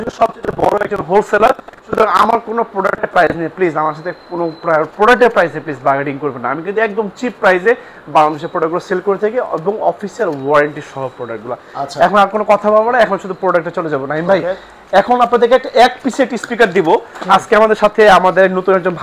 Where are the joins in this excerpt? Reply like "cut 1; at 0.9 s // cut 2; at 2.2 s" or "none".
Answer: none